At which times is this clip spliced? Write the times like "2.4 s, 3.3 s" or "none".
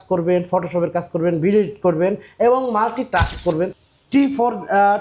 3.7 s